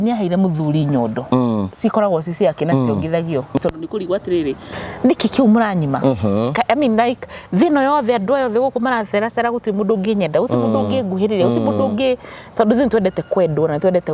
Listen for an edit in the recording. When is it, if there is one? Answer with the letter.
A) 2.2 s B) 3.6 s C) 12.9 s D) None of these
B